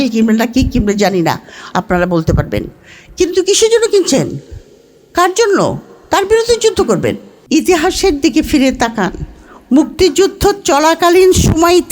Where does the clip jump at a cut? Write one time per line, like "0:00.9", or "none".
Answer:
0:07.3